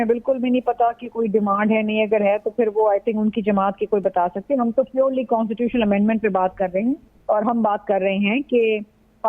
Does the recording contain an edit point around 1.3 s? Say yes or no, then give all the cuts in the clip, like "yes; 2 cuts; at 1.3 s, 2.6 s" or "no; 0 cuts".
no; 1 cut; at 7.1 s